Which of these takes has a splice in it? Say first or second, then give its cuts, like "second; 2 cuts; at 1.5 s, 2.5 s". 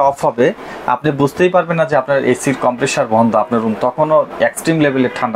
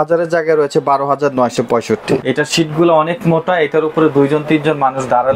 second; 1 cut; at 2.2 s